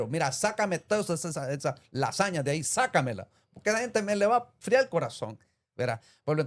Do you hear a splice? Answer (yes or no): no